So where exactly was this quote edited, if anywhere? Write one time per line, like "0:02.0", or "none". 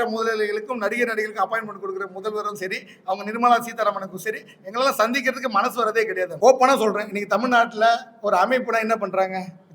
0:06.3